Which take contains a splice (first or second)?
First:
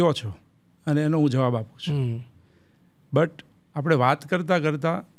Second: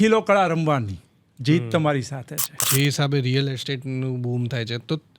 second